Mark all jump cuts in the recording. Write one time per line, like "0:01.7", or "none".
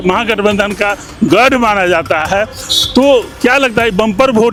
none